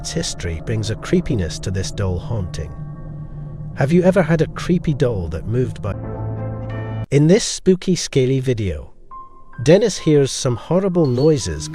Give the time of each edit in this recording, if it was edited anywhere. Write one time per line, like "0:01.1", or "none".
0:05.9